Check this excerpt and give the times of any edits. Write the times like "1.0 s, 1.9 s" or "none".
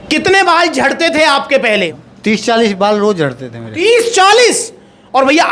1.9 s